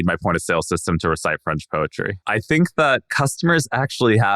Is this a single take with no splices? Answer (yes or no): no